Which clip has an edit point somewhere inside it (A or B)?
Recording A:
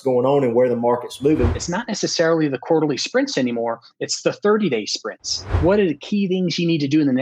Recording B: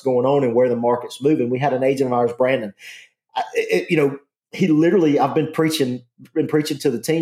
A